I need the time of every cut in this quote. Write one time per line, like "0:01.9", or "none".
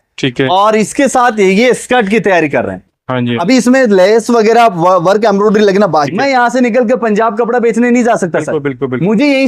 0:06.1